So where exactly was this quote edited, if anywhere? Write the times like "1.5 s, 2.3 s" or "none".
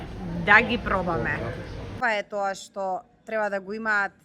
2.0 s